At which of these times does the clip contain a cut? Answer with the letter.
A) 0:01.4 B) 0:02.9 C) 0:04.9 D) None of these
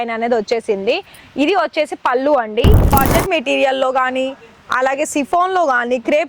B